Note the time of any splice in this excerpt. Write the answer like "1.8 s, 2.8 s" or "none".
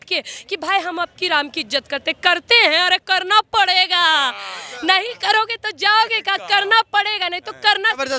none